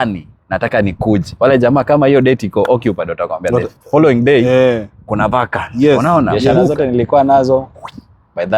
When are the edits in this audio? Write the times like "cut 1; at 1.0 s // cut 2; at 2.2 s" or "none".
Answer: cut 1; at 6.5 s

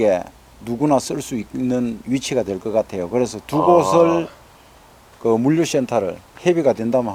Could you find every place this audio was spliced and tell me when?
none

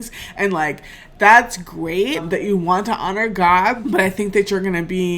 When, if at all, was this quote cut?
cut 1; at 2.2 s // cut 2; at 3.8 s

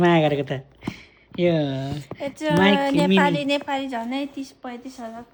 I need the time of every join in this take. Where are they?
none

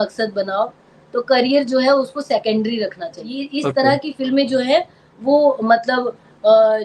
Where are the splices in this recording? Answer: cut 1; at 3.4 s

